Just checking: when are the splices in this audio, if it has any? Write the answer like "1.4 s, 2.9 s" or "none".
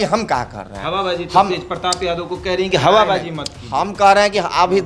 none